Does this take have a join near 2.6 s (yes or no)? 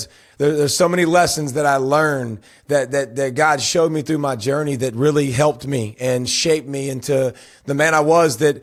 no